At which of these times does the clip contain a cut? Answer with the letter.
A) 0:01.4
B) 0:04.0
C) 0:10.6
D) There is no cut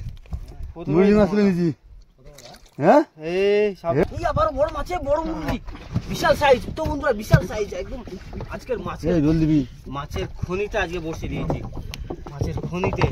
B